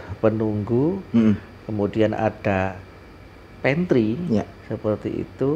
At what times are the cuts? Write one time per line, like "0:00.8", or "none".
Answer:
0:01.6